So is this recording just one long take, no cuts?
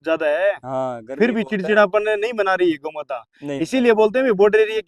yes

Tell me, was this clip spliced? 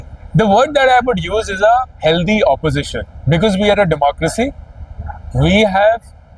no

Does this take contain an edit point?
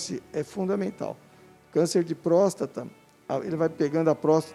no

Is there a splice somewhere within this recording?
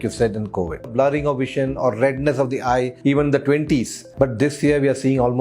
yes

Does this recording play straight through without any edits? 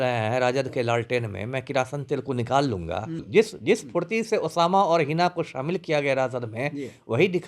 no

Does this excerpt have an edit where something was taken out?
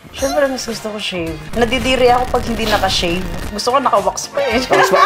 yes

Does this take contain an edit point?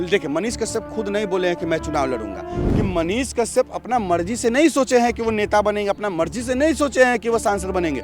yes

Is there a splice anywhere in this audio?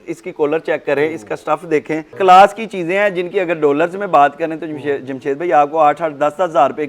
yes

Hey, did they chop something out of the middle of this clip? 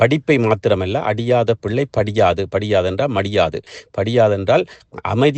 no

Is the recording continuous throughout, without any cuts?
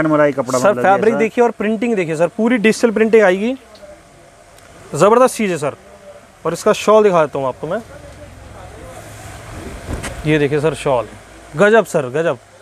yes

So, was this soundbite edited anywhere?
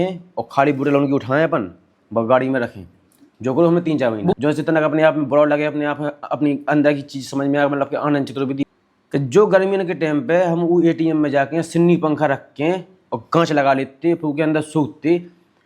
yes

